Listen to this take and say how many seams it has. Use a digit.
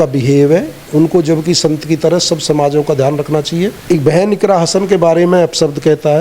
1